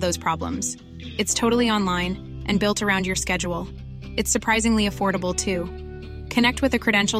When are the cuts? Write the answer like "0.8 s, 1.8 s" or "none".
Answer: none